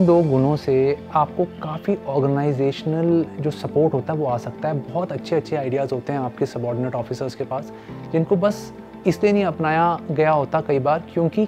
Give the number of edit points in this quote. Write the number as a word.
one